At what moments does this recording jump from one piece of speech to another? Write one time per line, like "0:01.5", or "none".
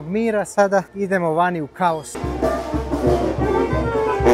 0:00.9
0:02.2